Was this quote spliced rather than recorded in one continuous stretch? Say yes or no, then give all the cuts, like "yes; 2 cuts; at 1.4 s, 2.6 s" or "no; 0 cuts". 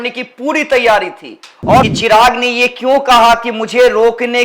yes; 1 cut; at 1.8 s